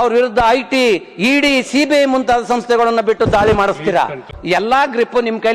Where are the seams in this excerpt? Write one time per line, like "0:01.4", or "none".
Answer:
0:04.3

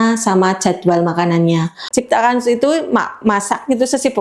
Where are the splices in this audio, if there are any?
0:01.8

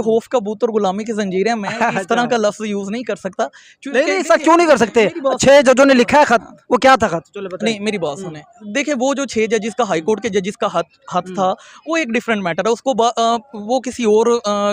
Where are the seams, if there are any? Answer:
none

